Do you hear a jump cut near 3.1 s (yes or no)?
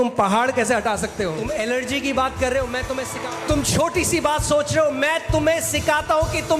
yes